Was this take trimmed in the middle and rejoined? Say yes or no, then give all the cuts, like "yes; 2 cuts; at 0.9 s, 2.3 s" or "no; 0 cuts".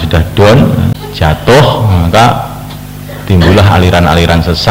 yes; 1 cut; at 1.0 s